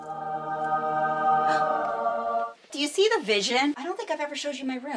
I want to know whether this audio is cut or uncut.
cut